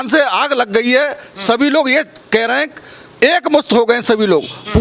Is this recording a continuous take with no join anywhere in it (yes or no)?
yes